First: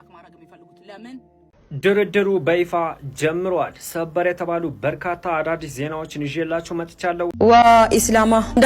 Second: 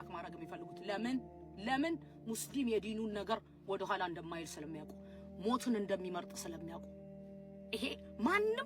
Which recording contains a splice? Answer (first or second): first